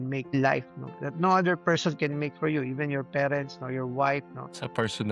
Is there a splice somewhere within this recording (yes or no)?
no